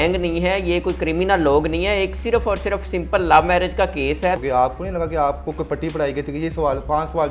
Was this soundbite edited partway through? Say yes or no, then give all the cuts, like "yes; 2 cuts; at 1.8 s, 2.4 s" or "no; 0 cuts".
yes; 1 cut; at 4.4 s